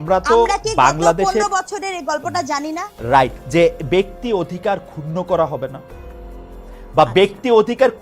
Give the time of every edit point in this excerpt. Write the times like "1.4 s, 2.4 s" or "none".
3.4 s